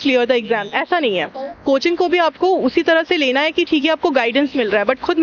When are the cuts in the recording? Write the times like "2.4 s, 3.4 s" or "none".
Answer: none